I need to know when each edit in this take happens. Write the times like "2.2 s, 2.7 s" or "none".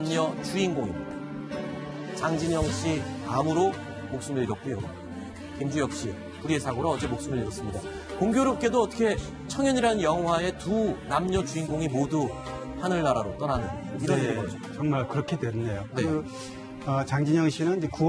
11.1 s